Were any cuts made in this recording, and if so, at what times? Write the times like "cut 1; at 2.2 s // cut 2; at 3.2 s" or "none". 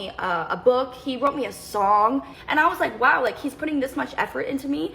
cut 1; at 2.4 s